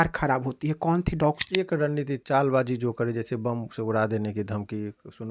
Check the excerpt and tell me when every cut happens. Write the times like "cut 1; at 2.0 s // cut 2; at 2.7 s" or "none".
cut 1; at 1.4 s